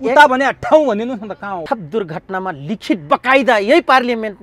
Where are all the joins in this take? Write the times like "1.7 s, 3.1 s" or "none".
1.6 s